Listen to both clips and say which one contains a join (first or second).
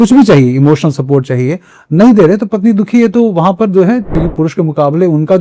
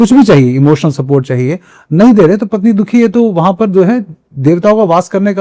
first